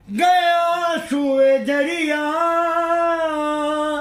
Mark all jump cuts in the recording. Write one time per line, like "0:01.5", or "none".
none